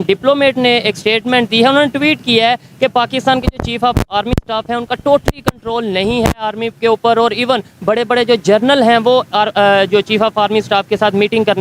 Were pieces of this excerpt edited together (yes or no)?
no